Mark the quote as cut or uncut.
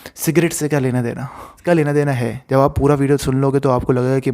cut